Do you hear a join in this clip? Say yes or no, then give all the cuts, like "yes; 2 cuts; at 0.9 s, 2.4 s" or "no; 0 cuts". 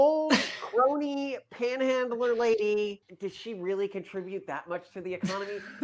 yes; 1 cut; at 3.1 s